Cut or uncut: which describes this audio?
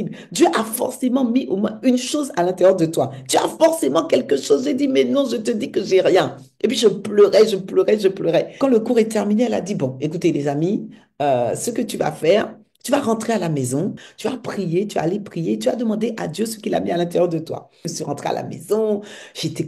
cut